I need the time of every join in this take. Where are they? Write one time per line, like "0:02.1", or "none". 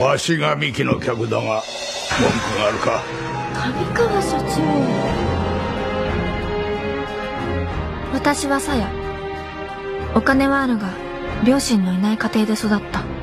0:01.7